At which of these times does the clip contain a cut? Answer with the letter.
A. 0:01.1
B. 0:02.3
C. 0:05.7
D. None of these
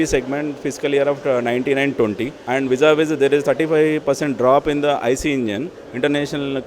B